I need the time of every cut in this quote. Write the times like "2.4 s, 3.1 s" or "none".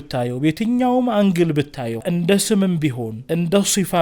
2.1 s, 3.1 s